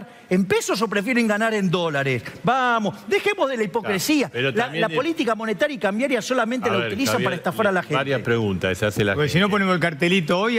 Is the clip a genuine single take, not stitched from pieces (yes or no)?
yes